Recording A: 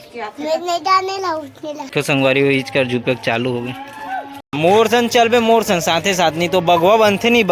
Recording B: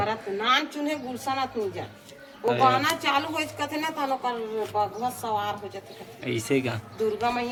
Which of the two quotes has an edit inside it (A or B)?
A